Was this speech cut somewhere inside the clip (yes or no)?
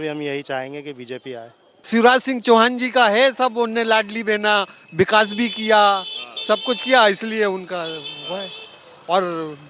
yes